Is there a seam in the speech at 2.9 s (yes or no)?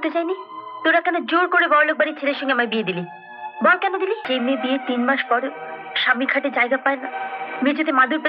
no